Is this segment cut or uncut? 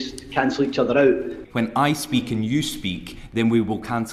cut